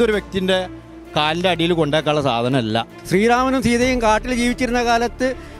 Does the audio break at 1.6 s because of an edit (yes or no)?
no